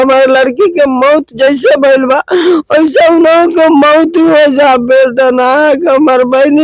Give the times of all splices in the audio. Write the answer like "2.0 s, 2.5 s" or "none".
none